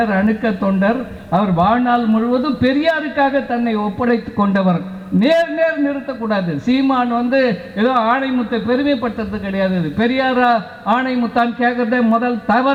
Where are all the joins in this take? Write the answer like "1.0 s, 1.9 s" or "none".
none